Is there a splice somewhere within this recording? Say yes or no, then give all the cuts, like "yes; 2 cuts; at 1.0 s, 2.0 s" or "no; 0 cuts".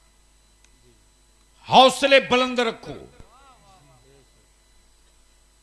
no; 0 cuts